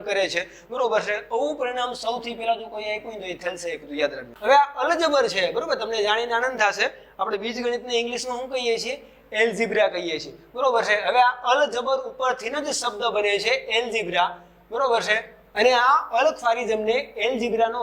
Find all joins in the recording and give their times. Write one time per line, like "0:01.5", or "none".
0:04.3

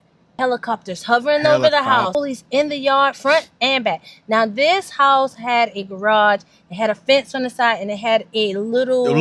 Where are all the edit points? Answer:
none

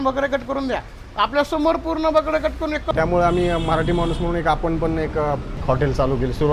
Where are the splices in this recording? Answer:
0:02.9
0:05.6

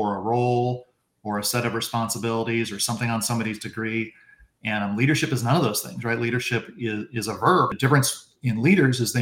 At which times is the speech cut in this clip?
0:07.7

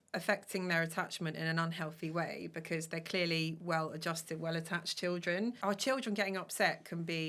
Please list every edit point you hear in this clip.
0:05.6

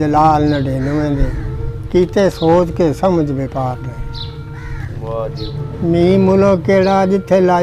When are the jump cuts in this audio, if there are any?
0:05.6

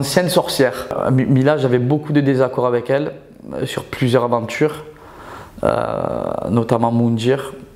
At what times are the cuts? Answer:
0:01.0

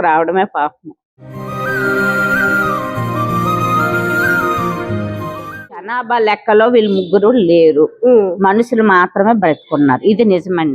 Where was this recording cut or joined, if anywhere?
0:05.9

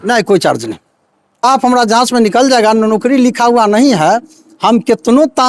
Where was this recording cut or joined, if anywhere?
0:01.4

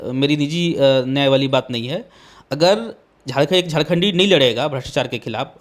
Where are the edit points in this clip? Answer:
0:03.0

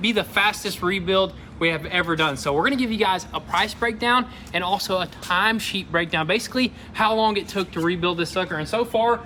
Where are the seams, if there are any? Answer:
none

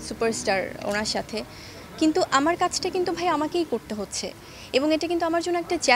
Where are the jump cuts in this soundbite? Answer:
none

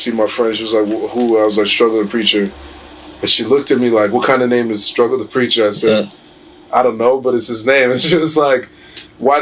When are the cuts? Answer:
none

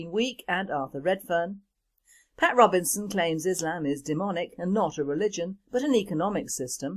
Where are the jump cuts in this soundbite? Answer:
none

